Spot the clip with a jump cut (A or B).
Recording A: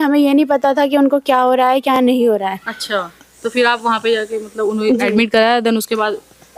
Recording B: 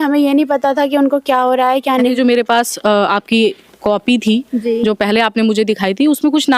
B